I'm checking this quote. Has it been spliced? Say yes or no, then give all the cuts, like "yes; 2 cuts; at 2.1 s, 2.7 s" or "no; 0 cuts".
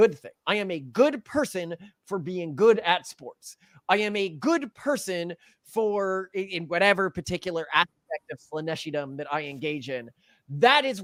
no; 0 cuts